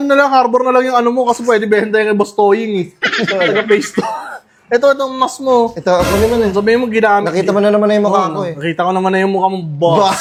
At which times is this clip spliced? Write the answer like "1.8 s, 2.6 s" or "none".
none